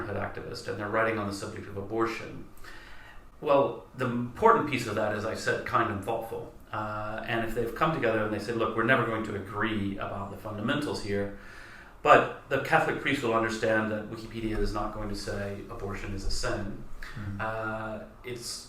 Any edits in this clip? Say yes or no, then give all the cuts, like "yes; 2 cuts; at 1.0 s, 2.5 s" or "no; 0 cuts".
no; 0 cuts